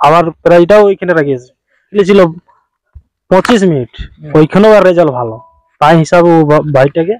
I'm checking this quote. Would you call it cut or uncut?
cut